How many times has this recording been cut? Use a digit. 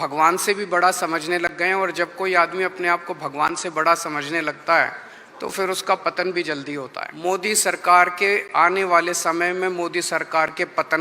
1